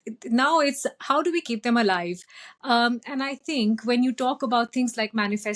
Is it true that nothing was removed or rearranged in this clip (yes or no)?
yes